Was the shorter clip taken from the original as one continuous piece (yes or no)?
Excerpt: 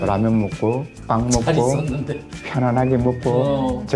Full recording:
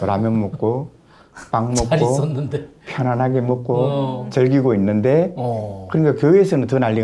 no